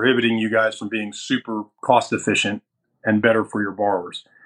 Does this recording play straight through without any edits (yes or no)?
no